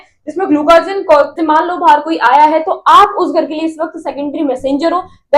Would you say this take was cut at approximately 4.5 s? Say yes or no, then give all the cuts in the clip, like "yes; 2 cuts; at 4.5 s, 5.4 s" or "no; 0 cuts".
no; 1 cut; at 1.4 s